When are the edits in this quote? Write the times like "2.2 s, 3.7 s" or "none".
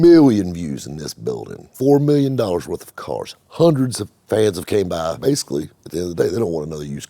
1.6 s, 5.2 s